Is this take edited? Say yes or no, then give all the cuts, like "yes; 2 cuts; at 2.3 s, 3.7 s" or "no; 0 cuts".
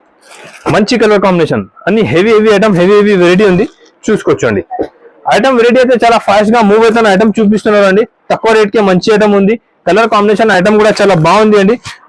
no; 0 cuts